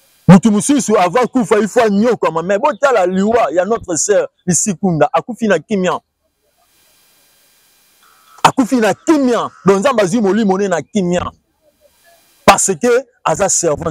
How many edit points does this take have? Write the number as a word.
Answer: zero